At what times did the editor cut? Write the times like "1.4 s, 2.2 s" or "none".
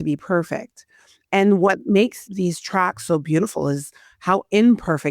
2.2 s